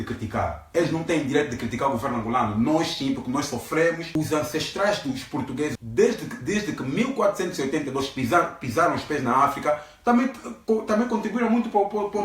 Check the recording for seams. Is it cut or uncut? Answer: cut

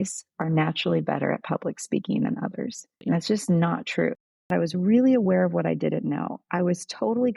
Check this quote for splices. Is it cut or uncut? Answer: cut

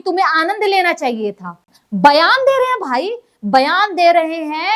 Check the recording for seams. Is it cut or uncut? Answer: cut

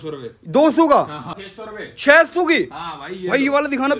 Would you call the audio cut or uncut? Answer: cut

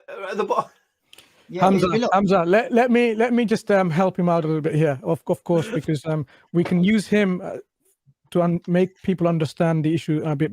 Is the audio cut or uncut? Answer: uncut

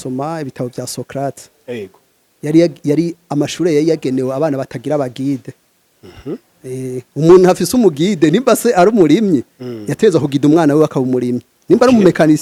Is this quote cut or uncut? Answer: uncut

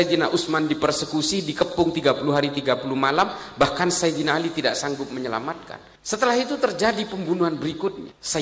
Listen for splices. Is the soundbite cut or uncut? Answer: cut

